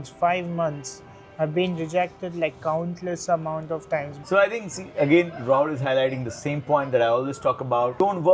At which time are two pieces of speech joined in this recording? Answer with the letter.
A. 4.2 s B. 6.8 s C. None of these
A